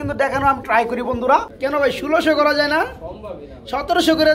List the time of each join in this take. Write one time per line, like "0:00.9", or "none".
0:01.5